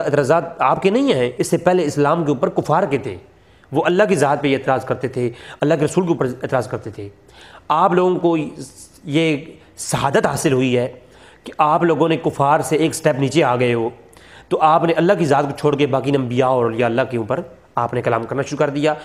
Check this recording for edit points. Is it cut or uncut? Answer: uncut